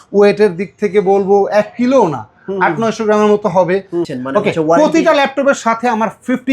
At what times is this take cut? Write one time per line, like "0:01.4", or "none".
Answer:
0:04.1